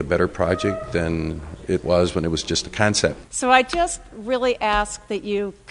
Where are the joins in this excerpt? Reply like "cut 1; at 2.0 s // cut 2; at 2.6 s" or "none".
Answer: cut 1; at 3.3 s